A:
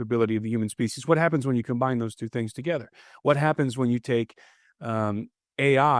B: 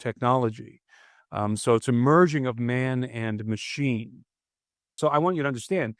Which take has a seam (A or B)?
B